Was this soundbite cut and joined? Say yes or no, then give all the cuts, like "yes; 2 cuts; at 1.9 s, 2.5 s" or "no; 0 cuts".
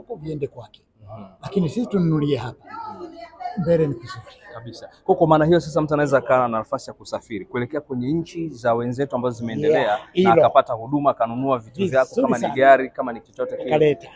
no; 0 cuts